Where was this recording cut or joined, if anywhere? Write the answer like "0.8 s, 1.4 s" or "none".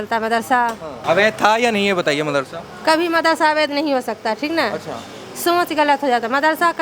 0.9 s